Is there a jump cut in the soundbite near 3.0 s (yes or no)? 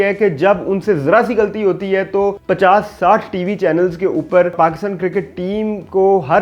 no